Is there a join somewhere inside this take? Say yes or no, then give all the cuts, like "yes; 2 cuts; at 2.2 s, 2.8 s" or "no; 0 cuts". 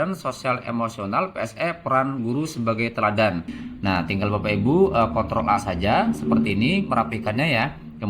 yes; 1 cut; at 3.6 s